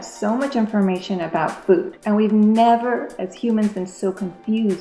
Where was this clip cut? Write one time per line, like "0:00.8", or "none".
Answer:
0:01.9